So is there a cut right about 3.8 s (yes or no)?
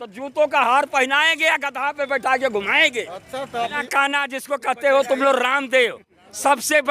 yes